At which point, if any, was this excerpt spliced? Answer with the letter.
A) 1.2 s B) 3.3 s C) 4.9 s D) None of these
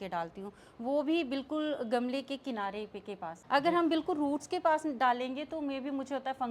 B